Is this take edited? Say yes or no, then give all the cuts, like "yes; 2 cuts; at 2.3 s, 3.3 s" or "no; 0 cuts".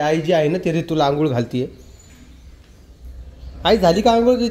no; 0 cuts